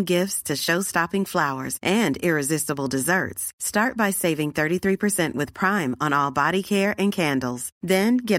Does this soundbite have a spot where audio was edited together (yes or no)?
no